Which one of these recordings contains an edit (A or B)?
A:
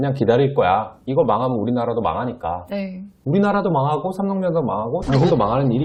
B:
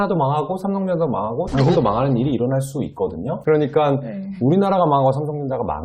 B